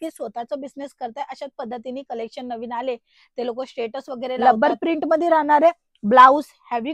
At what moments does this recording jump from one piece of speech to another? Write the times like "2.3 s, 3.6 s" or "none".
4.4 s